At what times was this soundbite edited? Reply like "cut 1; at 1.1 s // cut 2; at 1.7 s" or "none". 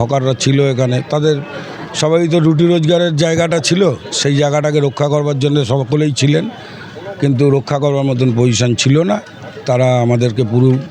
none

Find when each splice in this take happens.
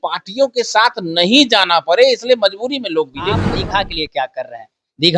cut 1; at 3.6 s

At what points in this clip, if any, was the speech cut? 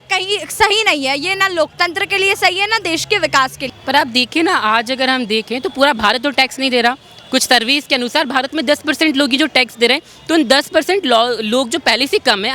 cut 1; at 3.7 s

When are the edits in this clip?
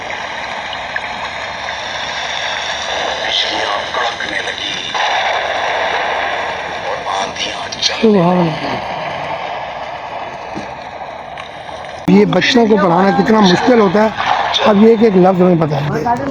cut 1; at 12.1 s

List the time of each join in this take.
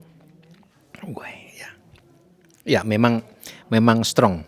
none

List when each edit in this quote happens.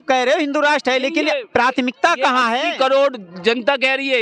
none

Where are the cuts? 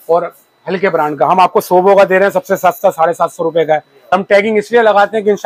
cut 1; at 4.1 s

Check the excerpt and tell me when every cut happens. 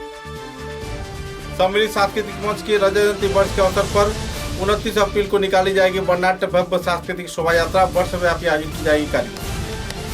cut 1; at 1.4 s

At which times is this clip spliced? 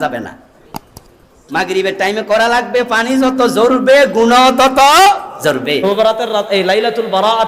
cut 1; at 5.8 s

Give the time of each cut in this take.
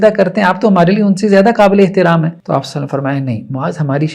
cut 1; at 2.4 s

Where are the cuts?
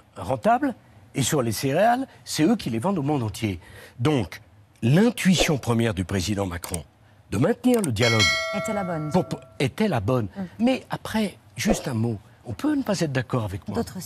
none

